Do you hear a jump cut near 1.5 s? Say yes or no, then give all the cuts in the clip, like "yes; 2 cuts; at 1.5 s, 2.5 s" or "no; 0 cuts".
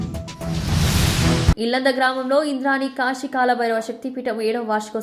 yes; 1 cut; at 1.5 s